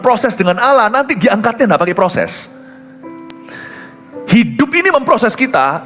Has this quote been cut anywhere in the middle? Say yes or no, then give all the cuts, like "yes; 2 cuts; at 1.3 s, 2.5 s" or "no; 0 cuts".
no; 0 cuts